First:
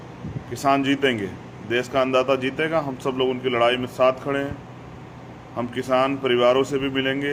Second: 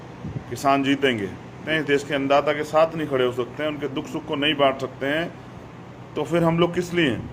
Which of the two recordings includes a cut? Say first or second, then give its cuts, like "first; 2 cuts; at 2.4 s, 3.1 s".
second; 1 cut; at 1.6 s